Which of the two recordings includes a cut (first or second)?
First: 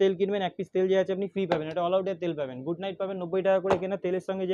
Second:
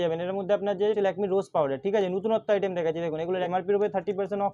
second